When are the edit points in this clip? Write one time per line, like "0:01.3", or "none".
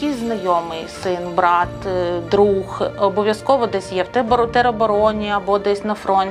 none